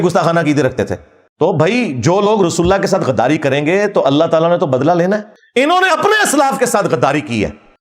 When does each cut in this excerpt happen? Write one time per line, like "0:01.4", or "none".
0:01.2
0:05.3